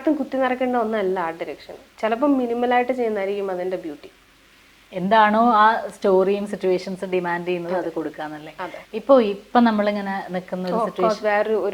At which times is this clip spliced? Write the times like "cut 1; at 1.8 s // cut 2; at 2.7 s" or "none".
none